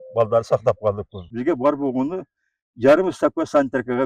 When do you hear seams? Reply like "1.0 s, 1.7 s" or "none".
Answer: 1.2 s